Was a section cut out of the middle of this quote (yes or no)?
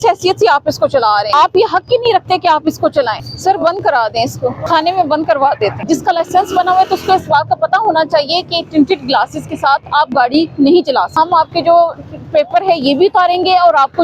yes